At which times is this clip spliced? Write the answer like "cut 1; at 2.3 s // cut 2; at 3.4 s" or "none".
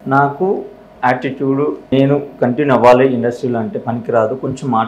cut 1; at 1.9 s